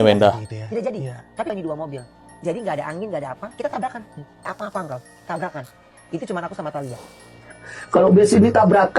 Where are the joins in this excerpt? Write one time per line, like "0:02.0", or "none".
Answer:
0:01.5
0:04.5